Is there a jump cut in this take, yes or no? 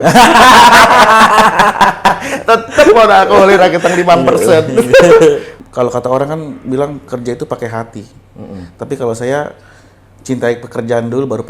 yes